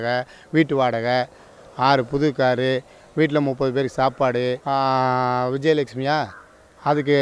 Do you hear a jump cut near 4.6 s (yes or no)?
yes